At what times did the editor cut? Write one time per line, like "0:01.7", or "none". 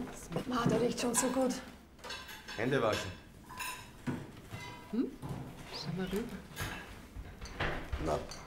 0:01.1